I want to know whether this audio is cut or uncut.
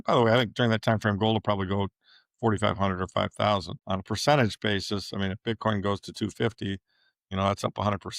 uncut